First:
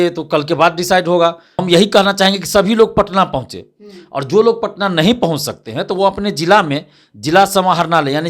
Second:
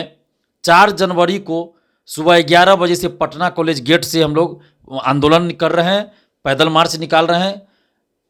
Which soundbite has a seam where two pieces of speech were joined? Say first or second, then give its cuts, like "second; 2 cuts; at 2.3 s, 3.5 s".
first; 1 cut; at 1.6 s